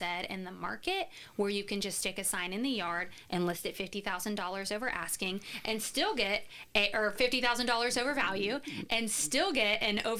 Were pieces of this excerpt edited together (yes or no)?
no